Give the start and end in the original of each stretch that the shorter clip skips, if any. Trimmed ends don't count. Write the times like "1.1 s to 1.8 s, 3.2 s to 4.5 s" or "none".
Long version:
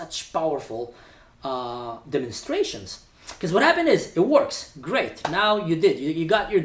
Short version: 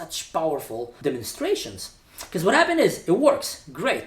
0.9 s to 2.0 s